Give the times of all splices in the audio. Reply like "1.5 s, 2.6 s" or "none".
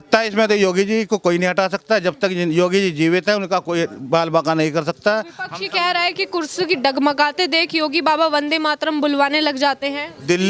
none